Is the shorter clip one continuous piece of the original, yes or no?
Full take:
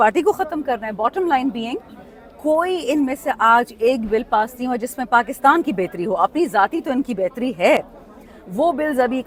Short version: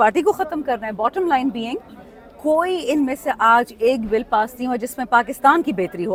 yes